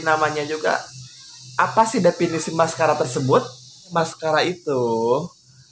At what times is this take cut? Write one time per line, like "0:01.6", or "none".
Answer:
0:03.9